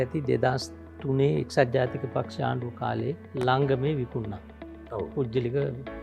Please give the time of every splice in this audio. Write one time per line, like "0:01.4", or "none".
0:03.3